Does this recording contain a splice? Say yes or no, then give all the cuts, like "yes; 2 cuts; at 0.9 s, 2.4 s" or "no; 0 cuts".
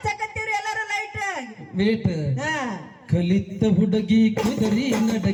no; 0 cuts